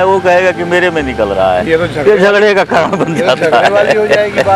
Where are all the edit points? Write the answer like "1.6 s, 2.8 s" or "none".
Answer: none